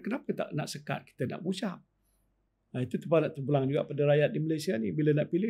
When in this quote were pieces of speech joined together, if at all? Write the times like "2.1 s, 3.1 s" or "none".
2.4 s